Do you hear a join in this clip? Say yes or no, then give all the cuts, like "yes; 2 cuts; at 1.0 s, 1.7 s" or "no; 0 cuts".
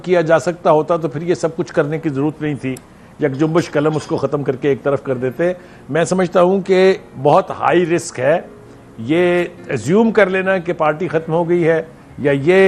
no; 0 cuts